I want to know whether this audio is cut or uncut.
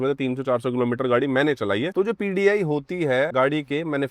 cut